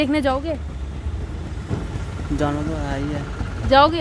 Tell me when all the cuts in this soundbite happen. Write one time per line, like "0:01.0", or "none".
none

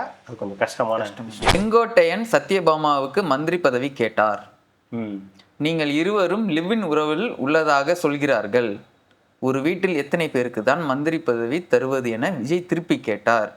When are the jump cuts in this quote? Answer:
0:01.6

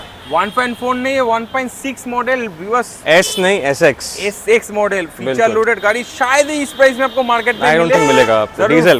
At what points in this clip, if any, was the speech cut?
none

